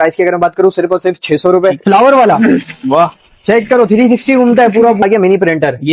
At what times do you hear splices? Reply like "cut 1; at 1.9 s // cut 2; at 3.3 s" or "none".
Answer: cut 1; at 1.8 s // cut 2; at 5.0 s